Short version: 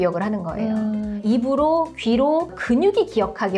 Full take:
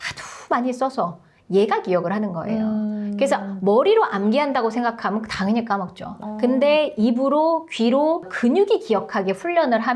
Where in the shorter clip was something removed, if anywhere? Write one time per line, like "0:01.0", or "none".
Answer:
0:01.2

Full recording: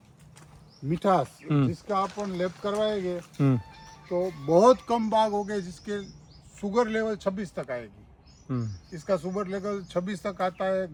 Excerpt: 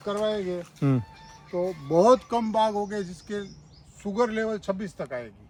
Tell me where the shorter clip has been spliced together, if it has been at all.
none

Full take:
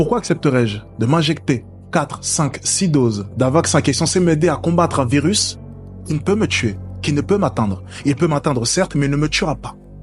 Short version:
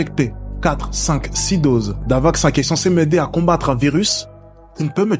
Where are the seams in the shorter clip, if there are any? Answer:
none

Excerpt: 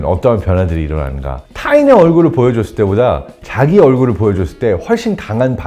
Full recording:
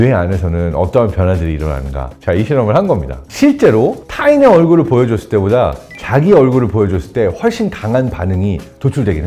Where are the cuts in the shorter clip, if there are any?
0:01.5

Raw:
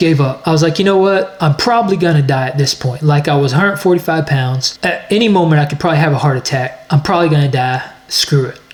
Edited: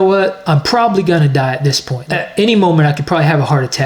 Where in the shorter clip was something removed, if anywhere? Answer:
0:01.9

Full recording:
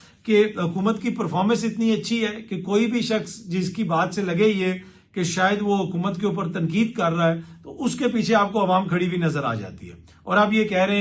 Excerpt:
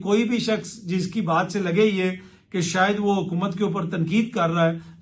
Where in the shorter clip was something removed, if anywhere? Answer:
none

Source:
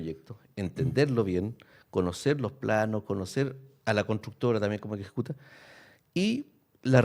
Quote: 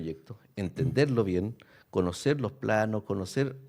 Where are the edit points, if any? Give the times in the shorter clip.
none

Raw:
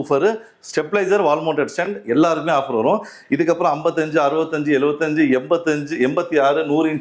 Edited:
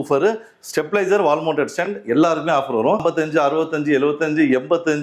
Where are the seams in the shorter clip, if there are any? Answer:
0:03.0

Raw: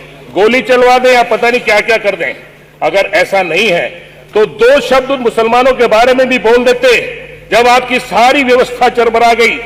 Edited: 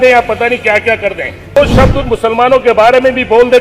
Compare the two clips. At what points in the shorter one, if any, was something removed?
0:01.6

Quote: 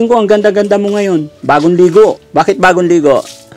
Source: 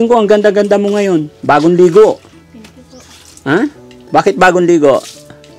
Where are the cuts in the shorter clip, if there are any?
0:02.2

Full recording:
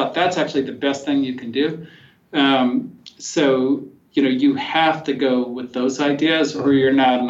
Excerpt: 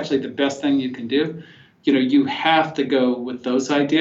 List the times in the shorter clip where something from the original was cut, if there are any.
0:01.7

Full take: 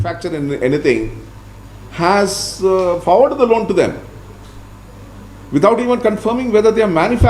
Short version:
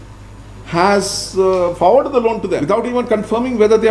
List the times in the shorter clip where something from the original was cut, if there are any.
0:02.6

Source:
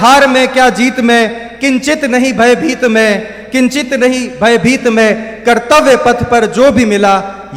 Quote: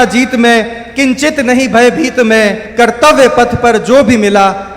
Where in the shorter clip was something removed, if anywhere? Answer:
0:02.6

